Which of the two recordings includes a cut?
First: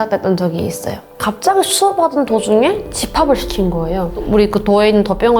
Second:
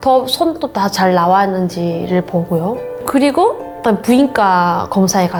first; 1 cut; at 4.1 s

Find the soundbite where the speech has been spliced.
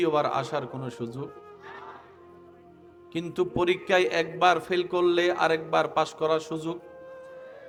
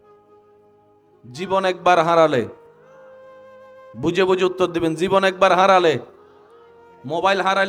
second; 1 cut; at 1.1 s

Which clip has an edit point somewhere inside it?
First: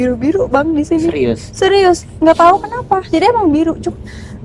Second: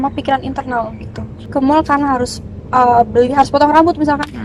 second; 1 cut; at 1.3 s

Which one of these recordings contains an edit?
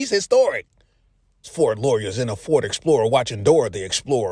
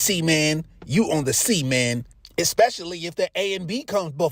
first; 1 cut; at 1.8 s

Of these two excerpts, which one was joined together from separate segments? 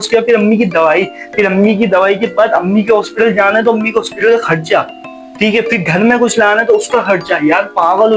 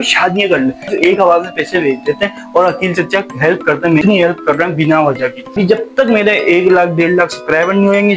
second; 3 cuts; at 0.9 s, 4.0 s, 5.5 s

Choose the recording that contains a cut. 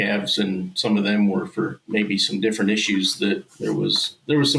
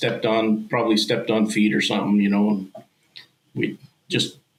first; 2 cuts; at 1.8 s, 3.5 s

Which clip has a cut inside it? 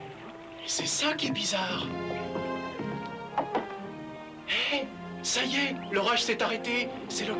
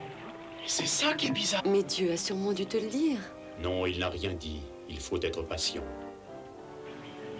first; 1 cut; at 1.6 s

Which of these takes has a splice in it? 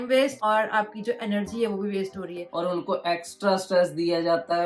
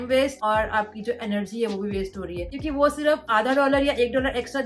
first; 1 cut; at 2.5 s

